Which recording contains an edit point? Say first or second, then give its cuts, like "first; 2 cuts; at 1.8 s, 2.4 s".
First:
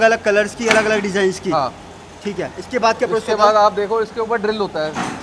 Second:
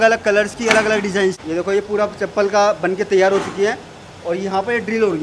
second; 1 cut; at 1.4 s